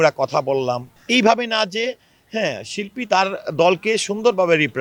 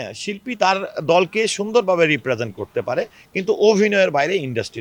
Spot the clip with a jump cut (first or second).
first